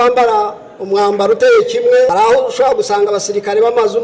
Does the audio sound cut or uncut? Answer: cut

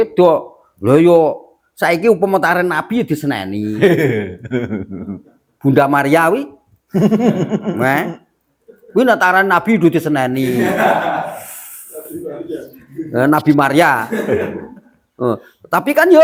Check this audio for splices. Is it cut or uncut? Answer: uncut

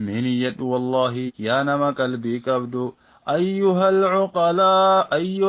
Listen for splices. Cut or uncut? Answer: cut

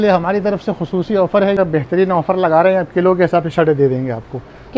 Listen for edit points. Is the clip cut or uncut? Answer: cut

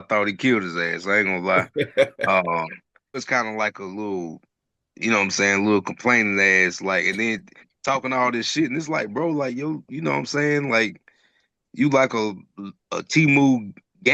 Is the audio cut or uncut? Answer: cut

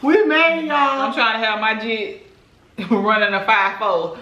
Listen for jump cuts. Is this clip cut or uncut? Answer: uncut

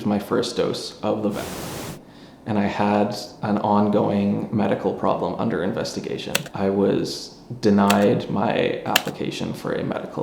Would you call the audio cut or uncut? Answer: cut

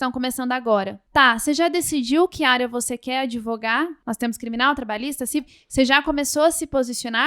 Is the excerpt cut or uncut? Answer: cut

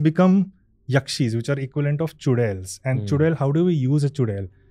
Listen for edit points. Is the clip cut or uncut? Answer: uncut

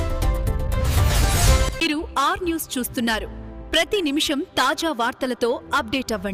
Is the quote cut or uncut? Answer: uncut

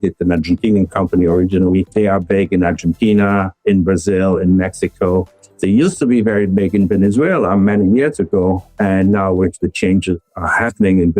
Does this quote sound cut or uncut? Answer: cut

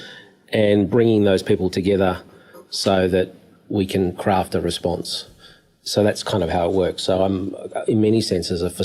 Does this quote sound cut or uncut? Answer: uncut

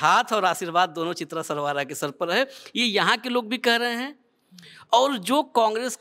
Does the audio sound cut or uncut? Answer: uncut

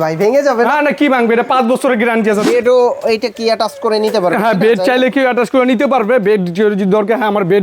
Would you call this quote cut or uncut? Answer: cut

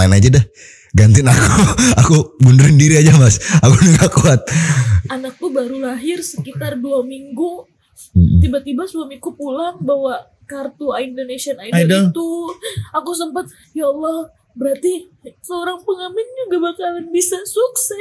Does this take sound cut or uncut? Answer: cut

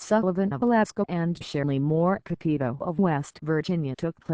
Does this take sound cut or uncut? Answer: cut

